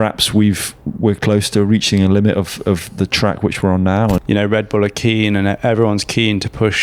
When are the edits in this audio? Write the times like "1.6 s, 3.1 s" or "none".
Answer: 4.2 s